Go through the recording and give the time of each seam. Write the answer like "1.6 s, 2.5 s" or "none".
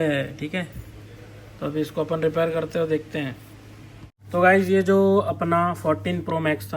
4.2 s